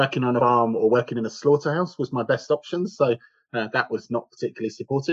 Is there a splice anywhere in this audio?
no; 0 cuts

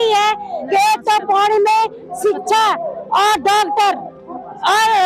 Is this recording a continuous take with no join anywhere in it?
yes; 0 cuts

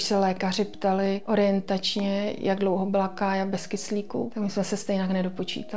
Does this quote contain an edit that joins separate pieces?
yes; 2 cuts; at 1.2 s, 4.3 s

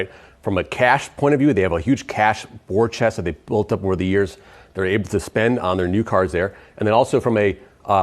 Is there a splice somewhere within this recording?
no; 0 cuts

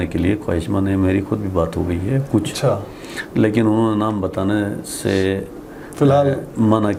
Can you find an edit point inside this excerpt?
no; 0 cuts

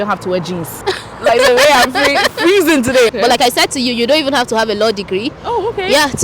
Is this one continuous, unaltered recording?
no; 1 cut; at 3.1 s

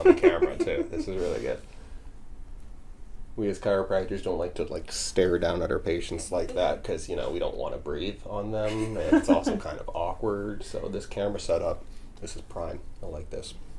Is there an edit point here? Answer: no; 0 cuts

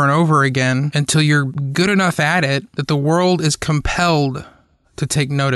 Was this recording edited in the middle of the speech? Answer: yes; 2 cuts; at 1.4 s, 2.7 s

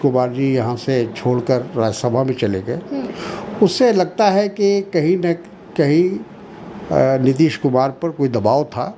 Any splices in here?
no; 0 cuts

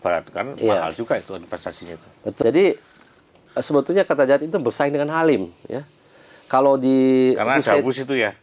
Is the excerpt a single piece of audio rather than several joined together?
no; 1 cut; at 2.4 s

